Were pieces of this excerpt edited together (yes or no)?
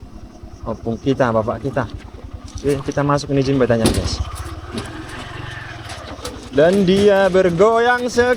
no